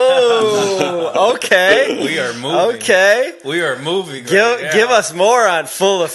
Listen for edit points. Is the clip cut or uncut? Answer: uncut